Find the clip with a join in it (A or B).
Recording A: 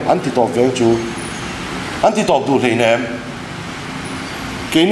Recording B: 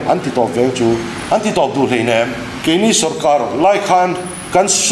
B